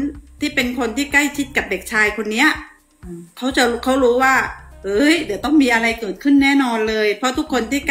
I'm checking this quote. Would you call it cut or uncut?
uncut